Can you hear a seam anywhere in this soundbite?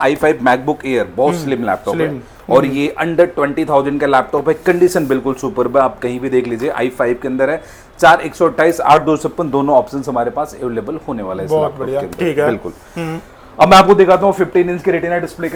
no; 0 cuts

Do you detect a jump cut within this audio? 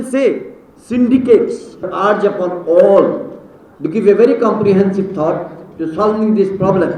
yes; 1 cut; at 1.9 s

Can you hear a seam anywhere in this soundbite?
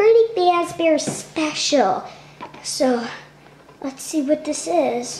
no; 0 cuts

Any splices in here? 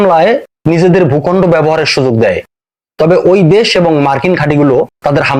no; 0 cuts

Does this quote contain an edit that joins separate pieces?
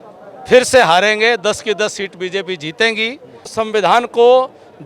yes; 1 cut; at 3.5 s

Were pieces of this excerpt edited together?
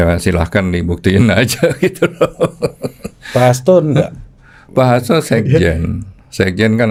no; 0 cuts

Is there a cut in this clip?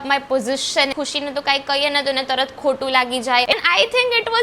yes; 2 cuts; at 0.9 s, 3.5 s

